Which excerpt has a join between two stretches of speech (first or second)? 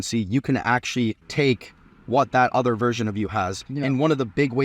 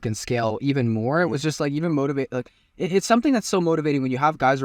first